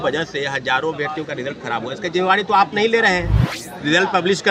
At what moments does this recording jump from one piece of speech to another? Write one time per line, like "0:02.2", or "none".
none